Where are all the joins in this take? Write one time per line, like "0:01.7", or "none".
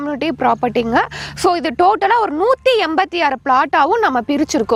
none